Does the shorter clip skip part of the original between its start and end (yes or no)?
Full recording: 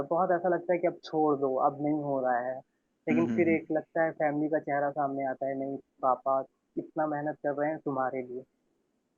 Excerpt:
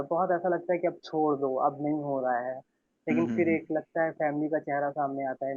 no